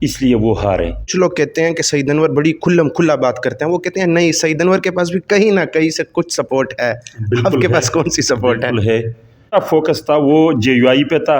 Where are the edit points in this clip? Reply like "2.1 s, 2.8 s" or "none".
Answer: 1.1 s, 9.5 s